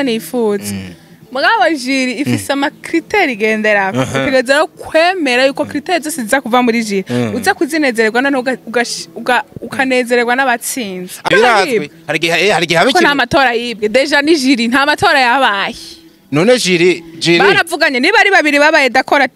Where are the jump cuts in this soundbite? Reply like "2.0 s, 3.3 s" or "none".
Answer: 11.3 s